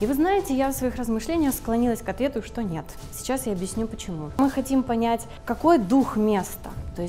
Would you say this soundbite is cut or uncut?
cut